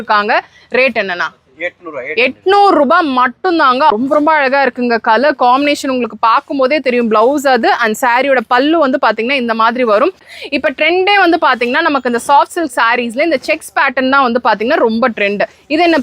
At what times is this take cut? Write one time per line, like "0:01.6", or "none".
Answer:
0:03.9
0:10.3